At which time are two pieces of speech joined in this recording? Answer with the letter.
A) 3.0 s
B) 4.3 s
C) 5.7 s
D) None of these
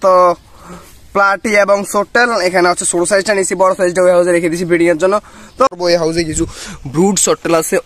C